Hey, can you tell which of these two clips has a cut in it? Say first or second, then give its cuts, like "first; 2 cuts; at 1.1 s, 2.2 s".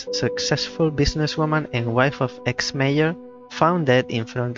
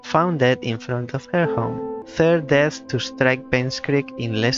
second; 1 cut; at 2.0 s